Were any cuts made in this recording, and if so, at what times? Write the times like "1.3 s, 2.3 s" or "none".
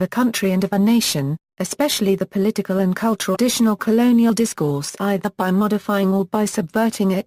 none